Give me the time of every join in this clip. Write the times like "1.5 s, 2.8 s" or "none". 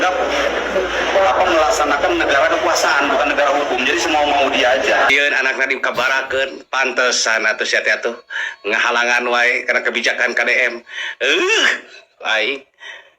5.1 s